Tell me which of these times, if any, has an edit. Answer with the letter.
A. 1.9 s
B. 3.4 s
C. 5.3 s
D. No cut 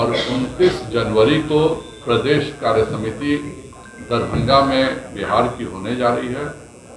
D